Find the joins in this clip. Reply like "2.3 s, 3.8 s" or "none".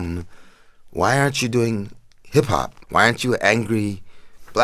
2.8 s